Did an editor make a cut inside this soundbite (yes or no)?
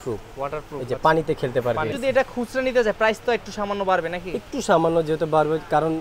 yes